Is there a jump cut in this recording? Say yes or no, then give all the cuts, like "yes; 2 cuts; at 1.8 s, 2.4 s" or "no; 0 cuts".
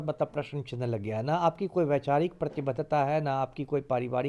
no; 0 cuts